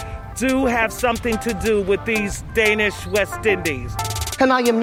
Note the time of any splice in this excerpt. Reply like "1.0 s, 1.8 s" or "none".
none